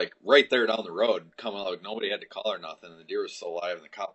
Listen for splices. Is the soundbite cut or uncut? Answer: uncut